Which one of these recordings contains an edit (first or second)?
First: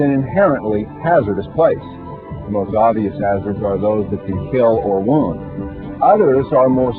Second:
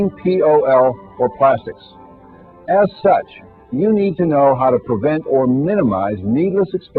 first